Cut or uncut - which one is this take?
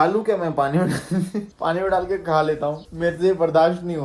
cut